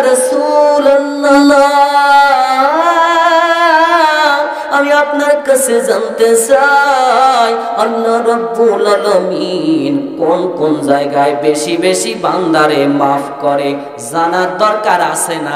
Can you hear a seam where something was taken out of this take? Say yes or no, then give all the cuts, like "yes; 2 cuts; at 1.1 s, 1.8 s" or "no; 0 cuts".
no; 0 cuts